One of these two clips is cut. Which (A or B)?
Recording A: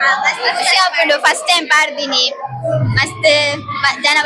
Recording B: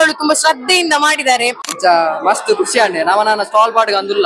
B